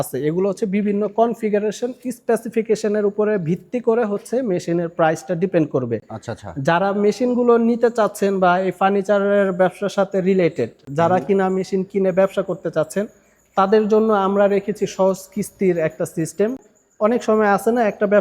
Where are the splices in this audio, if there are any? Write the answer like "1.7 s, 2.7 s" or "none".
none